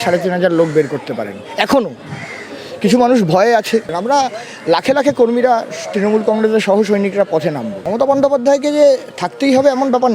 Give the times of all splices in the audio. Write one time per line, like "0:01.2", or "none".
0:03.9
0:07.7